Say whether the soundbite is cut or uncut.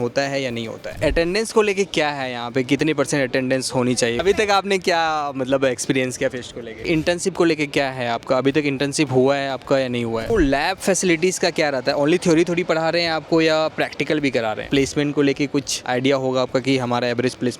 cut